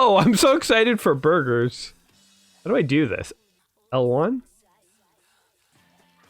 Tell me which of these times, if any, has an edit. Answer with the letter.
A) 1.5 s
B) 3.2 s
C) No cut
B